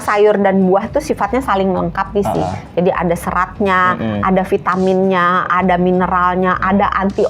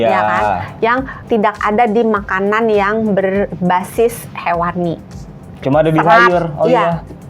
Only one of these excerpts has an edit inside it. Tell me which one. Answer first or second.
second